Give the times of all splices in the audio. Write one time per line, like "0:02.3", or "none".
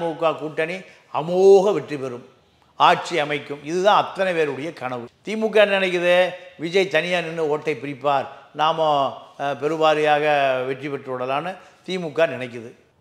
none